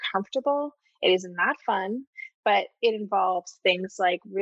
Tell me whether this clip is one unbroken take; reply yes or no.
yes